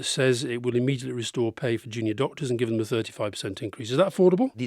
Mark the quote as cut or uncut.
uncut